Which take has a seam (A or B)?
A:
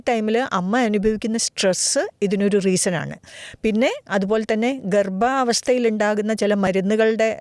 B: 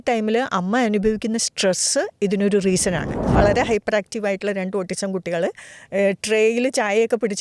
B